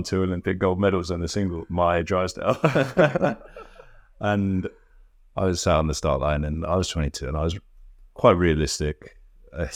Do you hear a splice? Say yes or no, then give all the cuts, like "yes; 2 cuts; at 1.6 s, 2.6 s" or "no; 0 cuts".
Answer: no; 0 cuts